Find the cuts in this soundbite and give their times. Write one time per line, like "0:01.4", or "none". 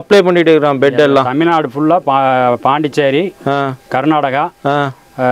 none